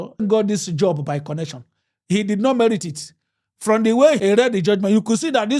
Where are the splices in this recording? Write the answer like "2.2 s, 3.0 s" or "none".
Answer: none